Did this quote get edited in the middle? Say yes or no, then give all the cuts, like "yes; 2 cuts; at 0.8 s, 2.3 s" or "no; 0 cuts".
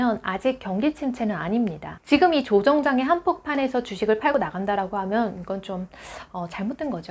yes; 1 cut; at 1.9 s